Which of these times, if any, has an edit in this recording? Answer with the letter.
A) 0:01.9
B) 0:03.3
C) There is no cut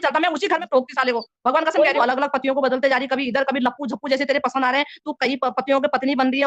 A